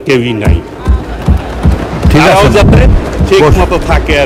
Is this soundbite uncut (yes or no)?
yes